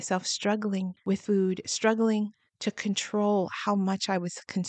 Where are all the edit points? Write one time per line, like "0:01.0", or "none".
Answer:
0:00.9